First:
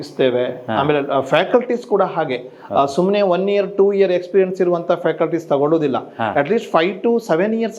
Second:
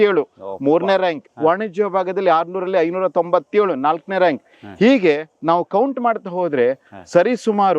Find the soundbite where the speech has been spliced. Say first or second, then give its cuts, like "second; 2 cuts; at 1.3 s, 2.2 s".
second; 1 cut; at 1.3 s